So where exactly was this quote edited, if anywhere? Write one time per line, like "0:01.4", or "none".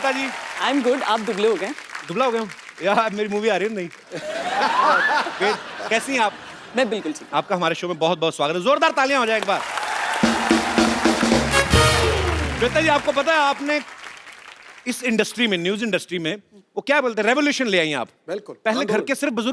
none